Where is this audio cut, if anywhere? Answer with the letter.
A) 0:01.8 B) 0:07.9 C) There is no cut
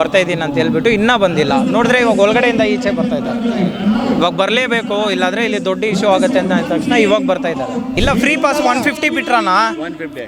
B